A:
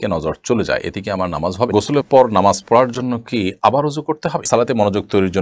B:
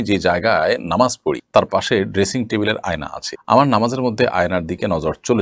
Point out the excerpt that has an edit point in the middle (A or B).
A